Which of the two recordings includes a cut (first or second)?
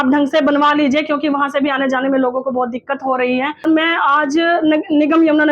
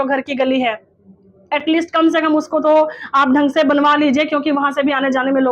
first